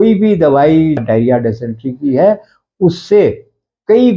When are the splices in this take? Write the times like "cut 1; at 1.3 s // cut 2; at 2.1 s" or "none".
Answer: cut 1; at 1.0 s